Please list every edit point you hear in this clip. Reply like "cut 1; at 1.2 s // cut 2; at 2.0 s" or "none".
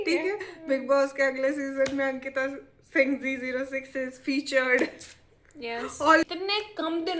cut 1; at 6.2 s